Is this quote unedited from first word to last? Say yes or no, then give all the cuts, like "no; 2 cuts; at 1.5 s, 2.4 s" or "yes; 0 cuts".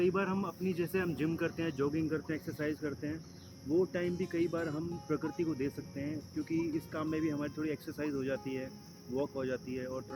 yes; 0 cuts